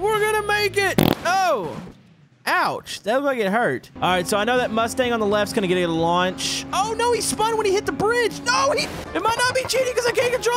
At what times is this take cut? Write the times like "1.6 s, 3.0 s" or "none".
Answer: 3.9 s, 9.0 s